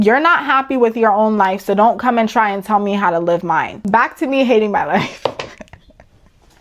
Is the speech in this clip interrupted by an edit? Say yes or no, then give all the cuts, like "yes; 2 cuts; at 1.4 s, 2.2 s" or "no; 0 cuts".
no; 0 cuts